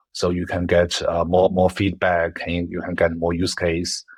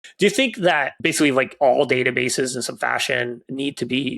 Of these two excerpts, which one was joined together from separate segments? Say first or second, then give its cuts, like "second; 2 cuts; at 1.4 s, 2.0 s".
second; 1 cut; at 0.9 s